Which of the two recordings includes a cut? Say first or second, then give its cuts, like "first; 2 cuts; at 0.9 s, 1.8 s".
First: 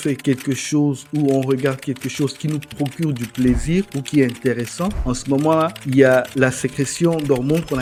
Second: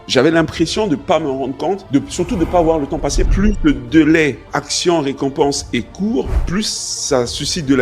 second; 2 cuts; at 1.8 s, 3.2 s